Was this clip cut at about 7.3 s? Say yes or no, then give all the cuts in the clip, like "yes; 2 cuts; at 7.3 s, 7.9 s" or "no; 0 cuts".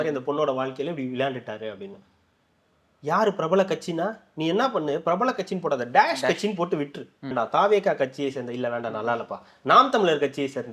yes; 1 cut; at 7.3 s